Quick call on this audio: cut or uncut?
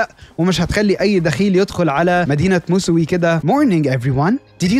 cut